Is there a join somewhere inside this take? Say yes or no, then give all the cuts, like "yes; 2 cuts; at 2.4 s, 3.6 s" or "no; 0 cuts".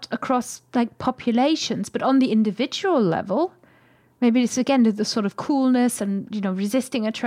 no; 0 cuts